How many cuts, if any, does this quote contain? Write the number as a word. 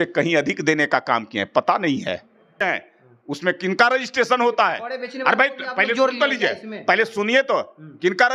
one